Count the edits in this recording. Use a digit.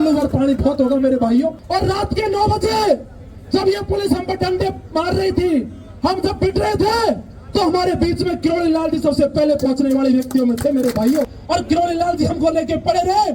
2